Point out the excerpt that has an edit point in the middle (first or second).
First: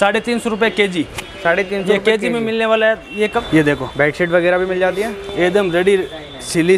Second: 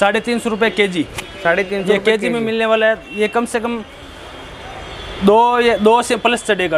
first